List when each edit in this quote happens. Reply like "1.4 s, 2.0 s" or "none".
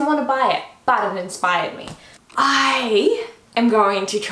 none